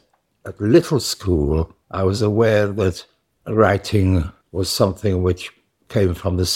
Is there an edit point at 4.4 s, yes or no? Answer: yes